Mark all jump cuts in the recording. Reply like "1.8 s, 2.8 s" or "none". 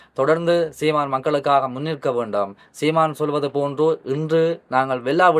none